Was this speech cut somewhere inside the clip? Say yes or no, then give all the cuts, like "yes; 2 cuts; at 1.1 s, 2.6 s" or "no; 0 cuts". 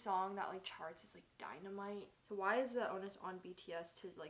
yes; 1 cut; at 2.3 s